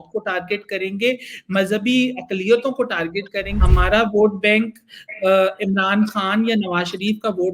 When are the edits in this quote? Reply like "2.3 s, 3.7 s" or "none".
3.5 s